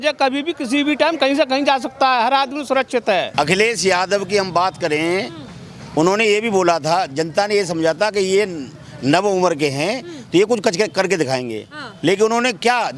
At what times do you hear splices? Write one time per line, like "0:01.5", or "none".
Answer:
0:03.3